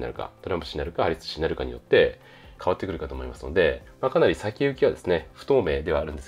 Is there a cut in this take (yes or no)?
no